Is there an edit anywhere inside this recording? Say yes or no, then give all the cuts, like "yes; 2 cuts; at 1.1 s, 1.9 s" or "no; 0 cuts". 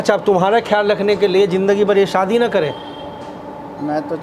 no; 0 cuts